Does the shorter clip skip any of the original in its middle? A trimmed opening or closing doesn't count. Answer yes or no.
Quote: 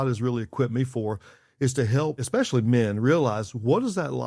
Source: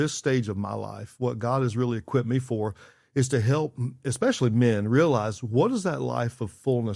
yes